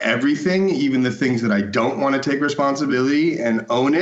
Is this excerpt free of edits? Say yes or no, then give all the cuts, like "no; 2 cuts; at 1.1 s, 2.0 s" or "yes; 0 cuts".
no; 1 cut; at 2.9 s